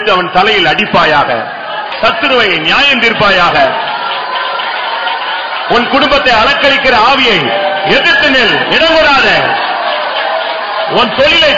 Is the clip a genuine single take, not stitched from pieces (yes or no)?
no